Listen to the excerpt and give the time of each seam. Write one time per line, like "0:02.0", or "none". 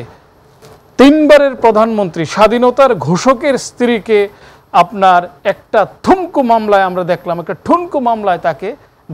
none